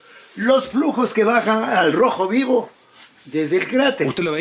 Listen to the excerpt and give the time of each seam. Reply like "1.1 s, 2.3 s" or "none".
none